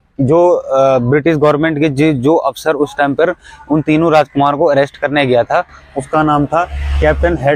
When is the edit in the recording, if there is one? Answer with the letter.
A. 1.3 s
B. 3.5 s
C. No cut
C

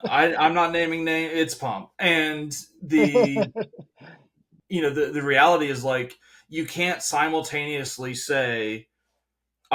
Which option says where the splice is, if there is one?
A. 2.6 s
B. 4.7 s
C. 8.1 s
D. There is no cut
D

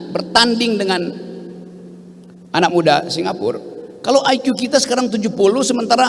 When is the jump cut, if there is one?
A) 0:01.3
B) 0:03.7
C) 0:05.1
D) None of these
D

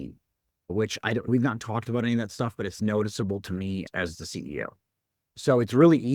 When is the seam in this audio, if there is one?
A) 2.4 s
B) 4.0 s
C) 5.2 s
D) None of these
C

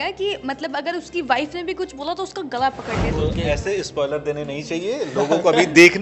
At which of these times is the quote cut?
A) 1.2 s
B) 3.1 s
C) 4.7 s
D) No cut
B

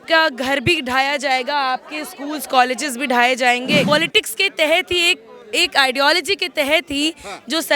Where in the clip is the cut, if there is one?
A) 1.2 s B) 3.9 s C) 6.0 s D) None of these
B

